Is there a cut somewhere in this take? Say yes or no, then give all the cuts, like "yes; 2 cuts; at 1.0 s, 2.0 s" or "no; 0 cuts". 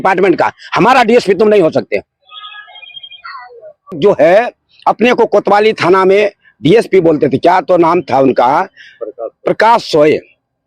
yes; 1 cut; at 4.0 s